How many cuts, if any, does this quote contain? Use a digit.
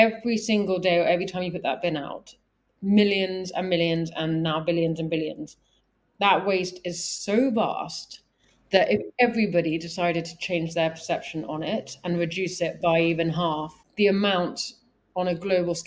1